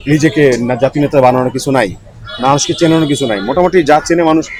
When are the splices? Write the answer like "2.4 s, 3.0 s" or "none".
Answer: none